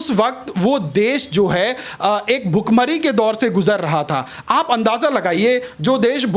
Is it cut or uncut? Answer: uncut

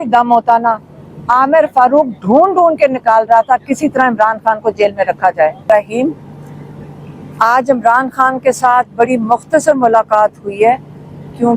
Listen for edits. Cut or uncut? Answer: cut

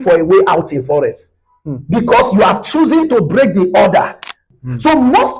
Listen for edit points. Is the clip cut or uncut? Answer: cut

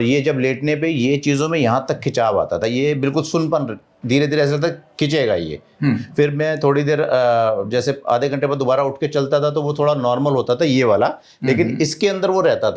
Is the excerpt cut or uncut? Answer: uncut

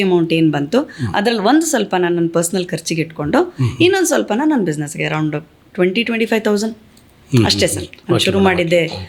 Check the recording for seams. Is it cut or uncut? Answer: uncut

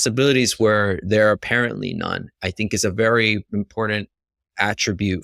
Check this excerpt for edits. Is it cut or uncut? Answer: uncut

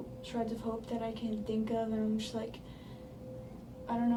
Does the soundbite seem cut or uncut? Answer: uncut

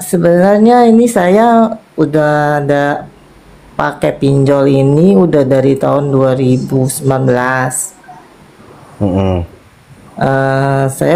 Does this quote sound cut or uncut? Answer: uncut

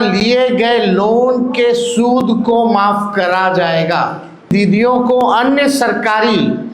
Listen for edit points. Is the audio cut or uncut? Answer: cut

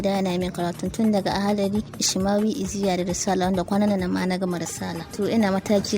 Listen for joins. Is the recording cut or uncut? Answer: cut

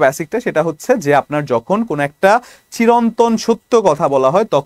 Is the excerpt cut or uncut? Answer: uncut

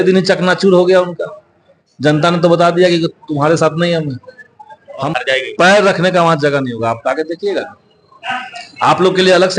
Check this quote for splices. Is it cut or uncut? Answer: cut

